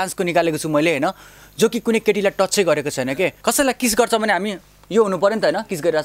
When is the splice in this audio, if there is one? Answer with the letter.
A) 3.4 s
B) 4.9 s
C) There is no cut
A